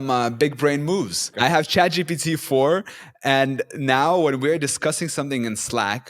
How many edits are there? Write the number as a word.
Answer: one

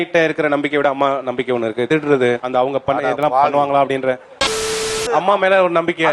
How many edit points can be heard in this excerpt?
one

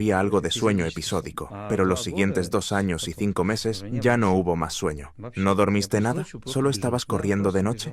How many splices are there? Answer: zero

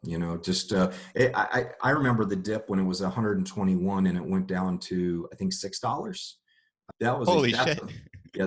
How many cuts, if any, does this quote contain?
one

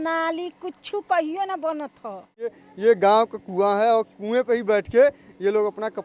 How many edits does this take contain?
one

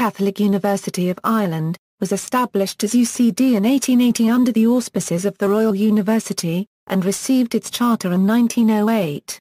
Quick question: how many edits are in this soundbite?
one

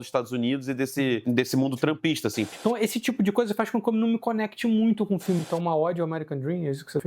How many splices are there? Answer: two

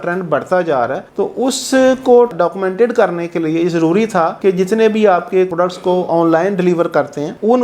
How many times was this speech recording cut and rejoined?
two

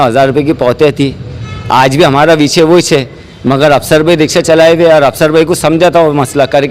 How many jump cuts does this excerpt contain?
zero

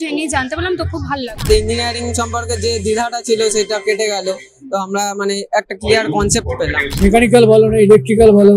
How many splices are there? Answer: two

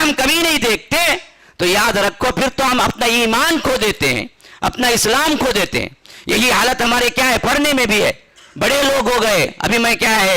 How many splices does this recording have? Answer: zero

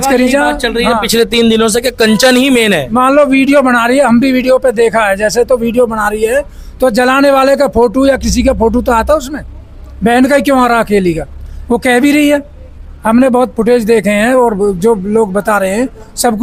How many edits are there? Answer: zero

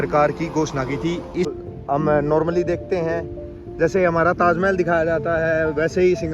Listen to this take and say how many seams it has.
one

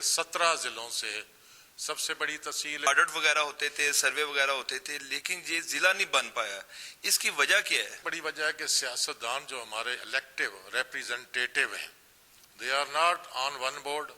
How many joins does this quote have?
two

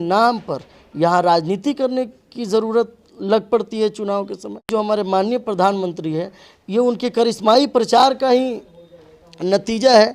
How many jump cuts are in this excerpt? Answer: one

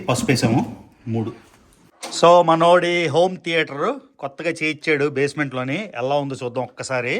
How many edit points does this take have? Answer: one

